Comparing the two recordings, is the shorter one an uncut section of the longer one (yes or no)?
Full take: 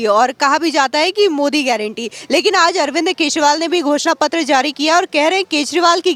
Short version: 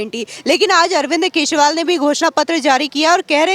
yes